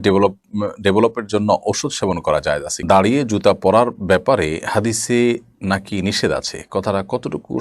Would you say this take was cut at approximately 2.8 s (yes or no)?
yes